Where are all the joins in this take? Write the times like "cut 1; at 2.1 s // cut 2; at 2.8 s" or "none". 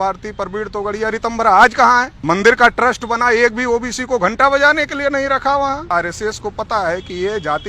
cut 1; at 2.1 s // cut 2; at 5.9 s